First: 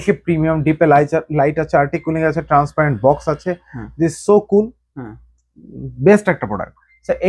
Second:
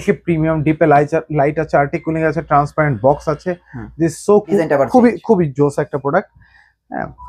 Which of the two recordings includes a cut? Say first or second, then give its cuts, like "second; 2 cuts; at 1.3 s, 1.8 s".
second; 1 cut; at 4.6 s